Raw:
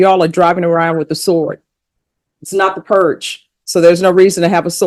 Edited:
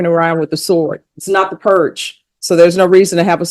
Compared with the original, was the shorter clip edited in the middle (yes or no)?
yes